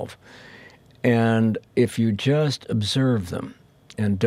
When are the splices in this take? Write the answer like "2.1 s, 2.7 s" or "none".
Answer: 1.6 s